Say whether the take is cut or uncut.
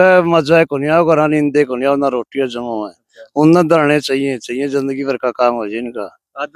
uncut